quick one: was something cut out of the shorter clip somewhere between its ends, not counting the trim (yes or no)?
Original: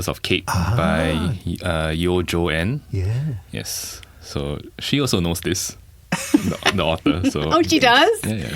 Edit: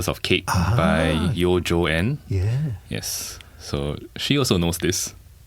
yes